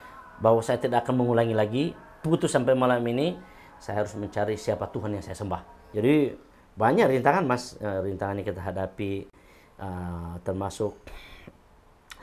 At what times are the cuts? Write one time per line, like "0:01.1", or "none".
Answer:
0:05.8